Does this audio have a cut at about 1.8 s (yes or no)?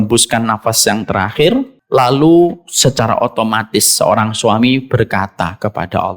yes